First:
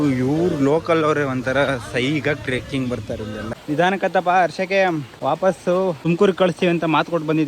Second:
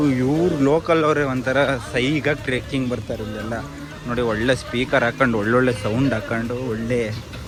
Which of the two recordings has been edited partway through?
first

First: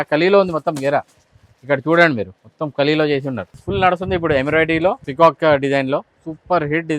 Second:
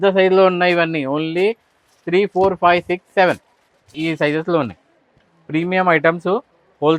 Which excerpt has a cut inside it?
first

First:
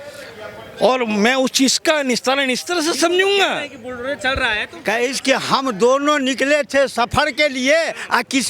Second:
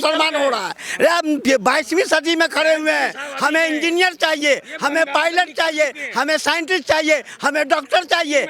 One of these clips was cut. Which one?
first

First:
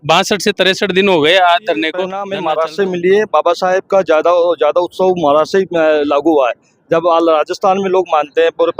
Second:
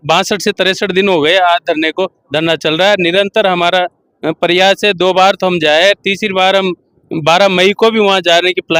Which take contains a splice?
first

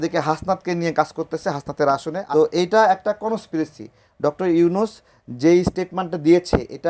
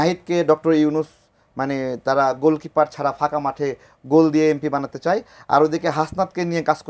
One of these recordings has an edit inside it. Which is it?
first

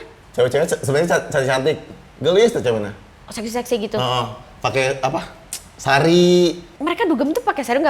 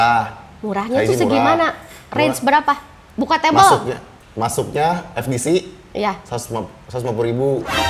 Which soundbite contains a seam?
first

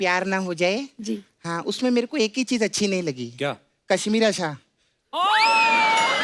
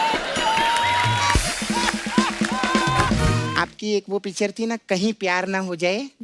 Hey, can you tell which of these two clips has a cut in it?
second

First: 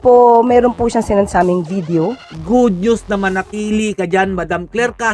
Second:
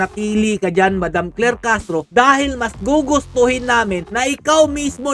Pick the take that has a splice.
first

